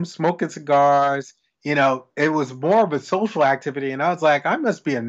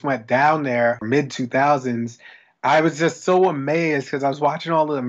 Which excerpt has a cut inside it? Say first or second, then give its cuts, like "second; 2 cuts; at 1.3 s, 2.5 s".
second; 1 cut; at 1.0 s